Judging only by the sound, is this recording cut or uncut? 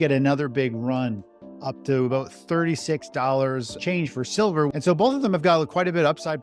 cut